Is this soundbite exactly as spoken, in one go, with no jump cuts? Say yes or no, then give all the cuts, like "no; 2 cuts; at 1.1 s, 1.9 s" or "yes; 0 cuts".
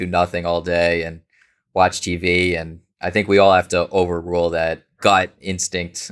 no; 1 cut; at 4.9 s